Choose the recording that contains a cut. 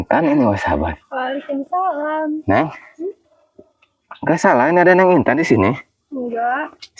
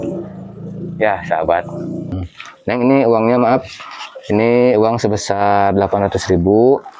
second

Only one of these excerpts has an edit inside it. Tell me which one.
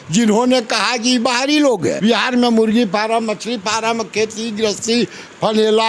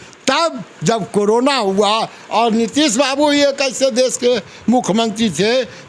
first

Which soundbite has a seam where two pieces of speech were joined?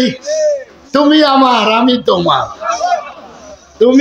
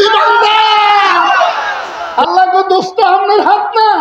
second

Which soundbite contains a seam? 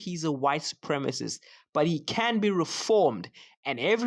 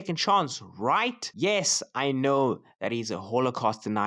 second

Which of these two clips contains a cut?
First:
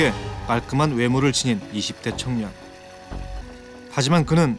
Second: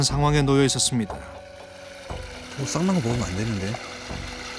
first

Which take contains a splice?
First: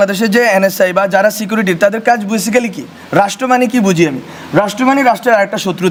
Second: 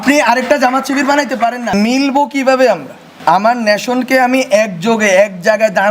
second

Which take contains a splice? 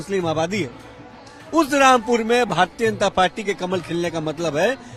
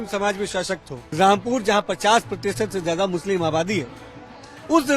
second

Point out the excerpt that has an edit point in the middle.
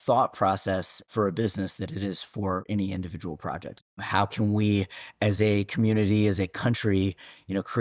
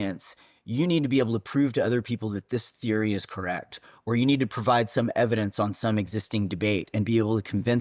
first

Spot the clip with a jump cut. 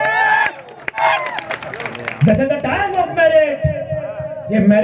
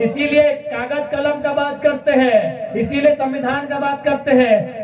first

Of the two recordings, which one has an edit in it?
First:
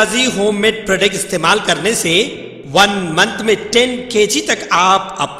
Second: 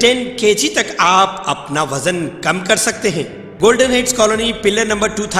second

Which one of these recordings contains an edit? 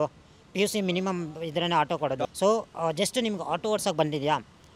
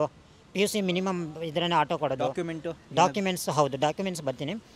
first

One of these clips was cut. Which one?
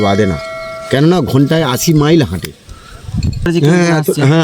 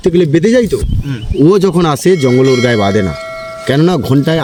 first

